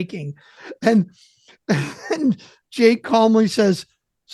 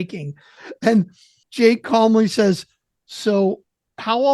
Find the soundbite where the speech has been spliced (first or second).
second